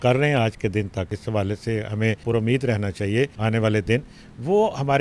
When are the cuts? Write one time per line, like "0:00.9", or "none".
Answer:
0:01.2
0:02.2
0:03.4